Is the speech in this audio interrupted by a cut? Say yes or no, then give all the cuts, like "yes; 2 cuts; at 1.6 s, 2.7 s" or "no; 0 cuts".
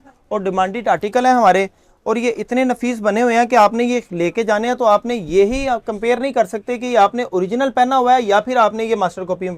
no; 0 cuts